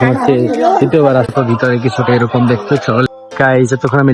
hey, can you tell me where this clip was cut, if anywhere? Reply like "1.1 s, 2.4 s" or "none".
1.3 s, 3.1 s

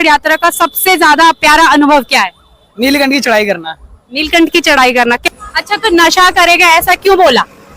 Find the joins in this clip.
5.2 s

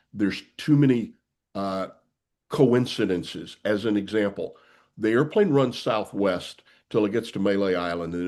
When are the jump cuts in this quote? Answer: none

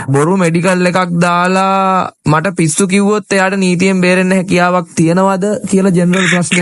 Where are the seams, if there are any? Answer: none

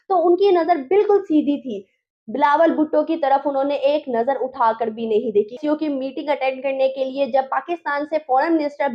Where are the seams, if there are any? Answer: 5.5 s

